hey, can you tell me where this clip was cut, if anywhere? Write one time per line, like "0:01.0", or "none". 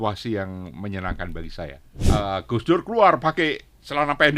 0:01.9